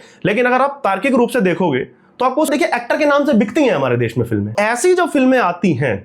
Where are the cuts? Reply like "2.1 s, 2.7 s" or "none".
2.5 s, 4.5 s